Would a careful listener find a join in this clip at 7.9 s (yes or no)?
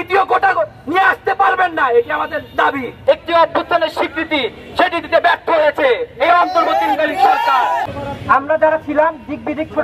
yes